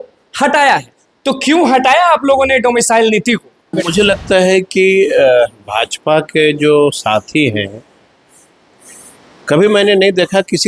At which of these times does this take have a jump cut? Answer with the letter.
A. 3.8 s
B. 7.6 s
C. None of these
A